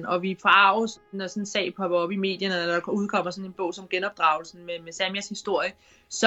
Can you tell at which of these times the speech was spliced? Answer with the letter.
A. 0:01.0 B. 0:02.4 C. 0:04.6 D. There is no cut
A